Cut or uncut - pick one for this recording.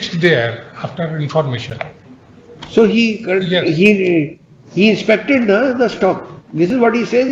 uncut